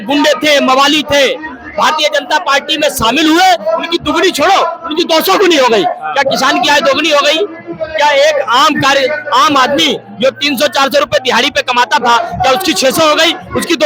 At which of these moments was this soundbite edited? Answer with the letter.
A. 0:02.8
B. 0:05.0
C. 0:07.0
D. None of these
D